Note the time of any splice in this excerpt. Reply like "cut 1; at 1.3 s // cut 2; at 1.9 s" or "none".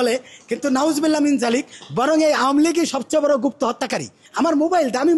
cut 1; at 4.2 s